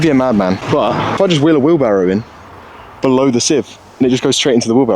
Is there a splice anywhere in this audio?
yes; 1 cut; at 1.2 s

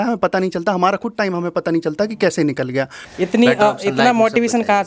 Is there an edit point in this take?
yes; 1 cut; at 3.0 s

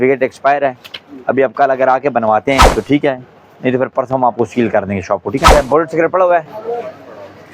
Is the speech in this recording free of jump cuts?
no; 2 cuts; at 2.7 s, 5.5 s

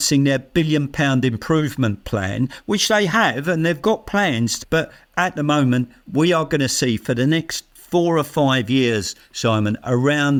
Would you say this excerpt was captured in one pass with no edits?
yes; 0 cuts

